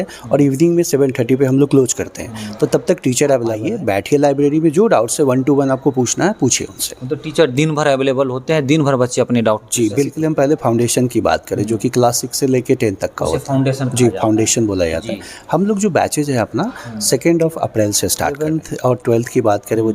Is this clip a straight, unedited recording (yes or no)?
no